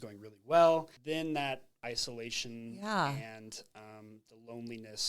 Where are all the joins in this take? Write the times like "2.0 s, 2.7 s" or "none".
0.9 s, 1.8 s

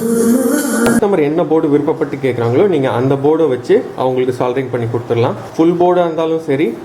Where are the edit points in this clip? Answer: 1.0 s, 5.4 s

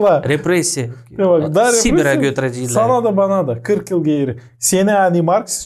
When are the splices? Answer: none

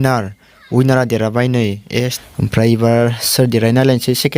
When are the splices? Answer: 2.2 s

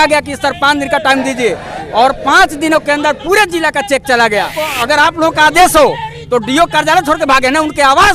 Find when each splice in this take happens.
4.7 s

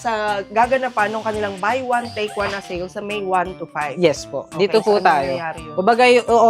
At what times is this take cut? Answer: none

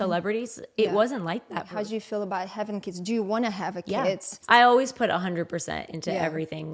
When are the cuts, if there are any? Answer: 1.7 s, 4.3 s

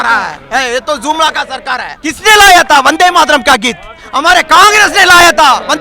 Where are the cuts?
1.9 s

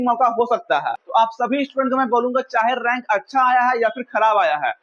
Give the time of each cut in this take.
1.0 s

